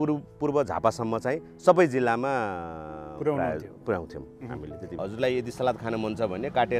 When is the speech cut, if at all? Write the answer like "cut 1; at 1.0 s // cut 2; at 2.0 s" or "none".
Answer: cut 1; at 4.9 s